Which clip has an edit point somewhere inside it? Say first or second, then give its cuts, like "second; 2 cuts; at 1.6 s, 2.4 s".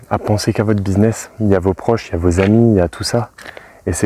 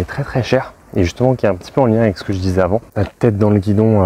second; 1 cut; at 2.9 s